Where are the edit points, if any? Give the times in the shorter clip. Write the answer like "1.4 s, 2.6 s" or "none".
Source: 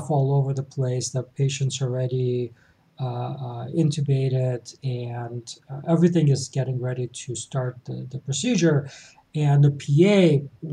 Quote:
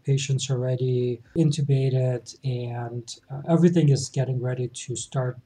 1.2 s

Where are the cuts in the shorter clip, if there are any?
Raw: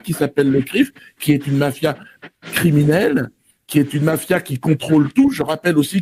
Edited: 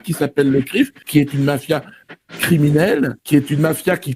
1.0 s, 3.2 s

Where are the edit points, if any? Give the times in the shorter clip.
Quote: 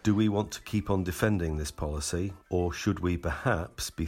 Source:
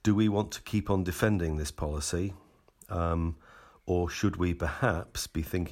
2.4 s

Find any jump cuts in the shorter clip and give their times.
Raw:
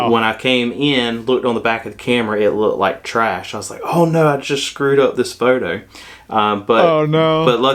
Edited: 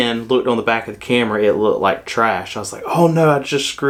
none

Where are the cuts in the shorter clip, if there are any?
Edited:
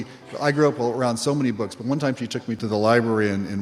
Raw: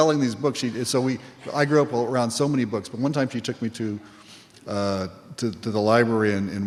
2.6 s

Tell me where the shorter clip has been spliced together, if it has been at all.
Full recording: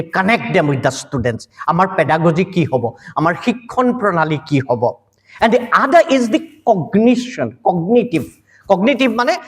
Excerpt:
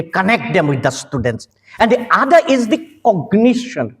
1.5 s

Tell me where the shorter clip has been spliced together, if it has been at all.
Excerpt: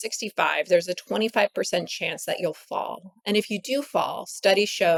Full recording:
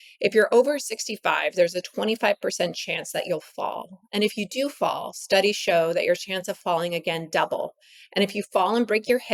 none

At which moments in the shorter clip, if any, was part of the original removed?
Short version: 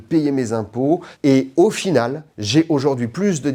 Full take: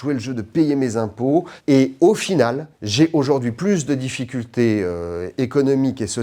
none

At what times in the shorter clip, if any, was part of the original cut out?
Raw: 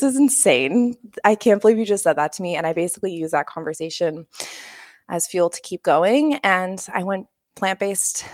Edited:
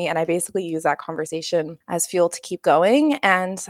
1.8 s

